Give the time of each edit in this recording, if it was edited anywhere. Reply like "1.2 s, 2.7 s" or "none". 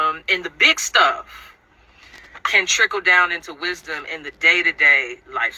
3.0 s